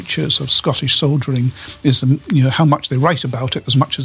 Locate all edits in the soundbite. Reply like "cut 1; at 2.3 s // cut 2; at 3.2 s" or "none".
cut 1; at 2.2 s